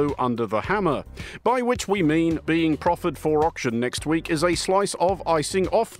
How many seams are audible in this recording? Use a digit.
2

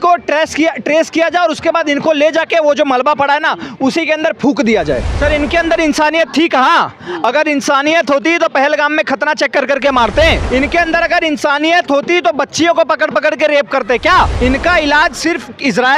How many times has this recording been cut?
3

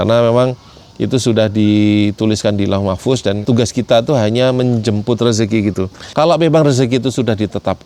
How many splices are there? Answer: 2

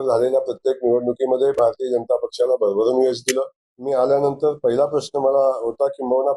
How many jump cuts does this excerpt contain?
1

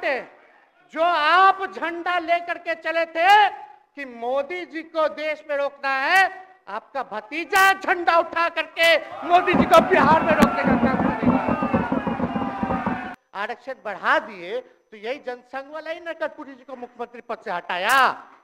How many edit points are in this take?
1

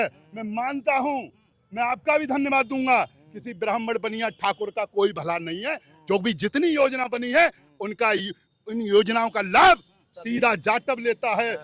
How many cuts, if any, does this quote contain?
0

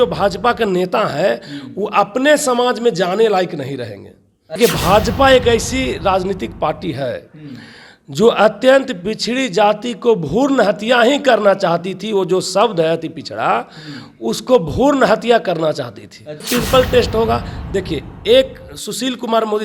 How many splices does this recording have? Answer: 2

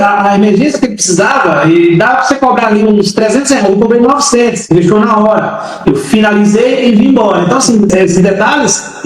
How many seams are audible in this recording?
1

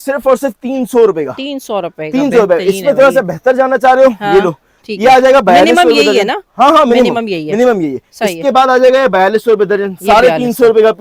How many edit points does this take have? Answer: 0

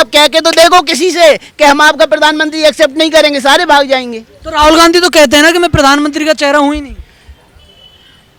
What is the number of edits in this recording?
0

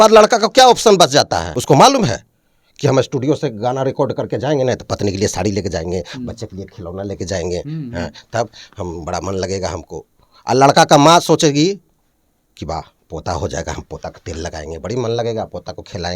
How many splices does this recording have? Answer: 1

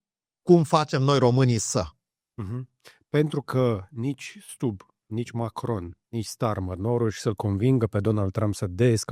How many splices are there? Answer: 0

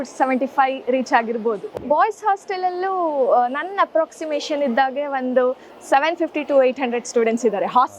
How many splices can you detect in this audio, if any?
1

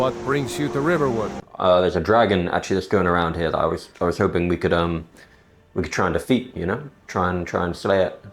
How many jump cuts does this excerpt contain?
1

